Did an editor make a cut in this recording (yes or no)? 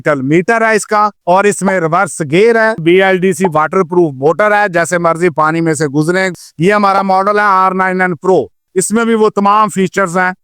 yes